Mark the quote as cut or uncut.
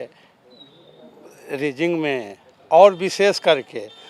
uncut